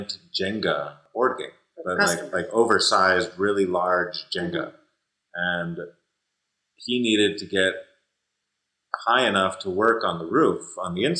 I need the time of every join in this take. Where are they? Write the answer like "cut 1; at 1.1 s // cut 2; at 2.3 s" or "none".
cut 1; at 1.0 s